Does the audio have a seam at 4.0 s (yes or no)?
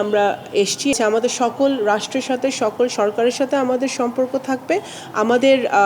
no